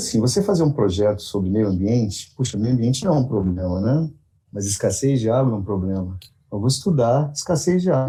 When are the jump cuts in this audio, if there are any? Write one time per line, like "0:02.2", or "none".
none